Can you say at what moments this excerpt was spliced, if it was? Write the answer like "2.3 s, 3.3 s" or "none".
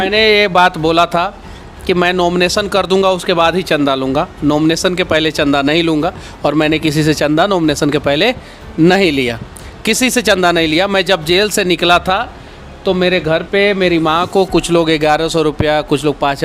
none